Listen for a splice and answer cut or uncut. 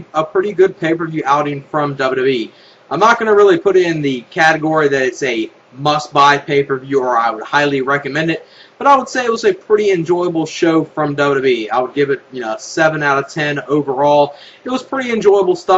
cut